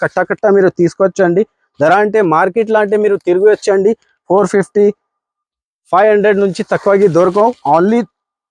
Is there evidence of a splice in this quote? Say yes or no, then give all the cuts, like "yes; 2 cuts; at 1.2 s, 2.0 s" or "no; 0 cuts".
no; 0 cuts